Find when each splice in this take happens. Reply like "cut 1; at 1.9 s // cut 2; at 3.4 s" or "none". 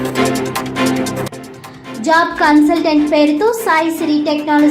cut 1; at 1.3 s